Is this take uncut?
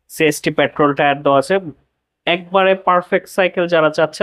yes; 0 cuts

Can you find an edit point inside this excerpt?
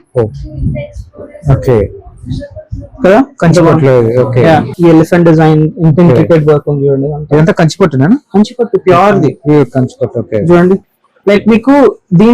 yes; 1 cut; at 4.7 s

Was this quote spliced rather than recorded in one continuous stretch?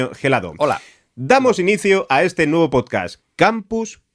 no; 0 cuts

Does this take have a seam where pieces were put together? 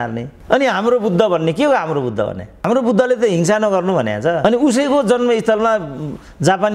no; 0 cuts

